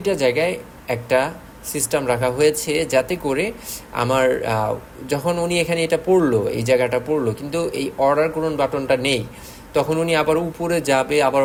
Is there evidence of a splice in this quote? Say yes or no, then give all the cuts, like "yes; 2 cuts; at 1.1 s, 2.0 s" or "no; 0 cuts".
no; 0 cuts